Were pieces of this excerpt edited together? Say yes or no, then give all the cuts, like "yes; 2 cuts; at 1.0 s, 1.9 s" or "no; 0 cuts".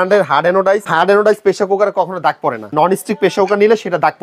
yes; 2 cuts; at 0.9 s, 2.7 s